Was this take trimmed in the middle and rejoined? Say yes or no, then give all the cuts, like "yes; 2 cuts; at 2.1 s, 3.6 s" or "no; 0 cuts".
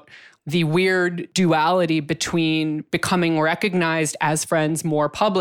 no; 0 cuts